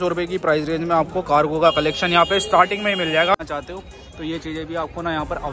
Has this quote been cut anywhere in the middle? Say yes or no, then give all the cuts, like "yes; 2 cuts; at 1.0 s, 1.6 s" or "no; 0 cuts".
yes; 1 cut; at 3.3 s